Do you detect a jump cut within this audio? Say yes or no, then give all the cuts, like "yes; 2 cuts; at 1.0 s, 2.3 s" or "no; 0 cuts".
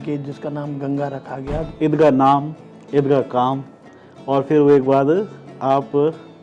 yes; 1 cut; at 1.6 s